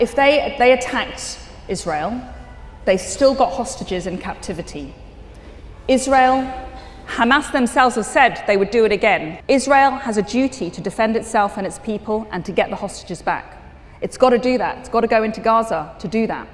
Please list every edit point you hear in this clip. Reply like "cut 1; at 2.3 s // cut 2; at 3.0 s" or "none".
cut 1; at 9.3 s